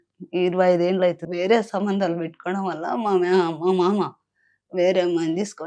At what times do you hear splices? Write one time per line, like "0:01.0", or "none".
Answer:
0:01.2